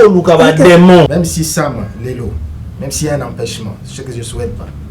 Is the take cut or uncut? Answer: cut